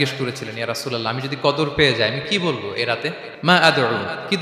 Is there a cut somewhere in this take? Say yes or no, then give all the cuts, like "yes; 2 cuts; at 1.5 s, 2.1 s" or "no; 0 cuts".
yes; 1 cut; at 3.3 s